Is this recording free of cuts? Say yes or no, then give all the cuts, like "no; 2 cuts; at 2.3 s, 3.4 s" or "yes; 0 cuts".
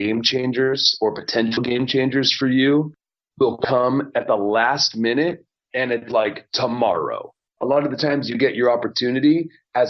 no; 1 cut; at 7.4 s